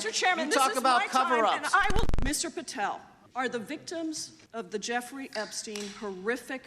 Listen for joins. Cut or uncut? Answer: cut